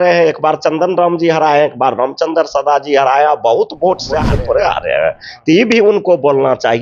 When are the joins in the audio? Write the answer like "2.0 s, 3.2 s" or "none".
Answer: 4.3 s